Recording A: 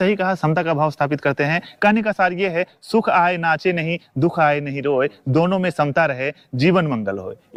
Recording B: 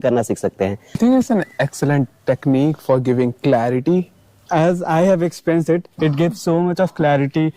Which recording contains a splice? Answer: B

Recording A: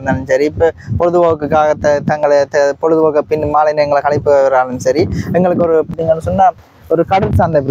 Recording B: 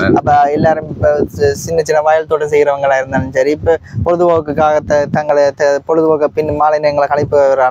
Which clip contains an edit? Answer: A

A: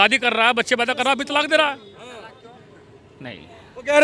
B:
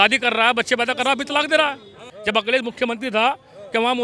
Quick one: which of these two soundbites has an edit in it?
B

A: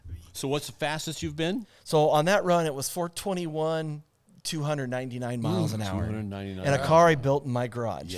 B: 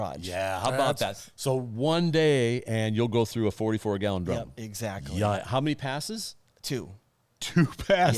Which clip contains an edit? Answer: B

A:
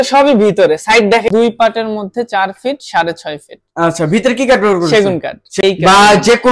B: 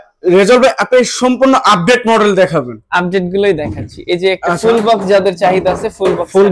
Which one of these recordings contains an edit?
A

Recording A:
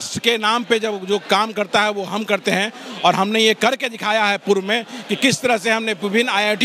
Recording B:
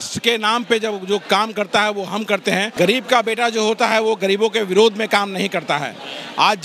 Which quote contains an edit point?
B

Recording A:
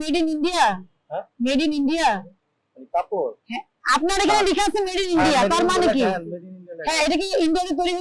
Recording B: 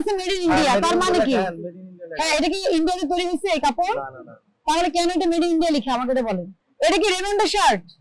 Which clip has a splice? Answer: B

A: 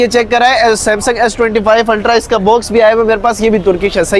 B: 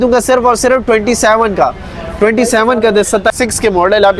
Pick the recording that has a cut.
B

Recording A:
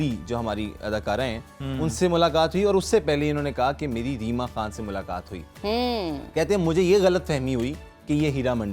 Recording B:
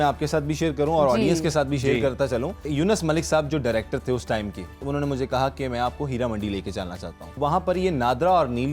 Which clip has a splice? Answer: B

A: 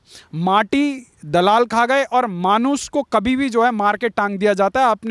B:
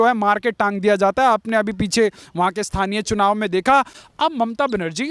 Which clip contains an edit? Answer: B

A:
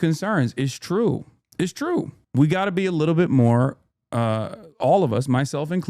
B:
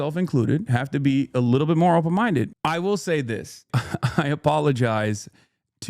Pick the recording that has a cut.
B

